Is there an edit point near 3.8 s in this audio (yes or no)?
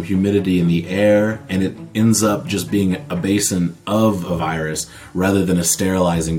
no